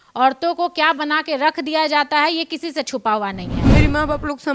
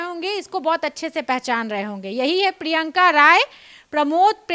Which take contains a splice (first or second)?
first